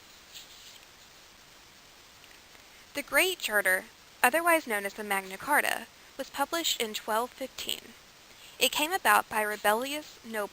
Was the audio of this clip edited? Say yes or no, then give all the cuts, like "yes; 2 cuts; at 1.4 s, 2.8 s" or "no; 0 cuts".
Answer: yes; 1 cut; at 1.3 s